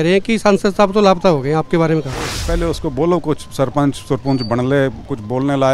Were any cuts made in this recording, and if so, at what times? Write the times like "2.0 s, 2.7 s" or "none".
2.4 s